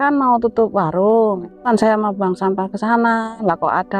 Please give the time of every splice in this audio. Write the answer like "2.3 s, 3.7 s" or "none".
1.6 s